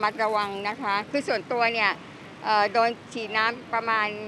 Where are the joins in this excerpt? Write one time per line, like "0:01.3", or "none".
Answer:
0:01.1